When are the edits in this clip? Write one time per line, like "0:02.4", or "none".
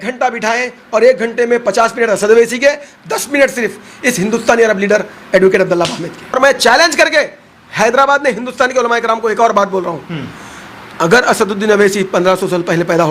0:06.4